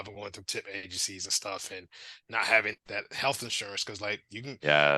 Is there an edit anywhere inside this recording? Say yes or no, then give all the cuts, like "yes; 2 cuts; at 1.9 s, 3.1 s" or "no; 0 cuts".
yes; 1 cut; at 2.8 s